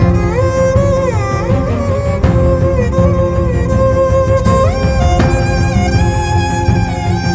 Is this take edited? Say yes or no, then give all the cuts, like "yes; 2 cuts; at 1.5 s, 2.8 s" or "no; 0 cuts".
no; 0 cuts